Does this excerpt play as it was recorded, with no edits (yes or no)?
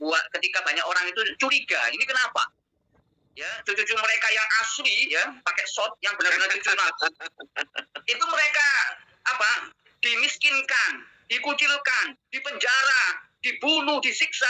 no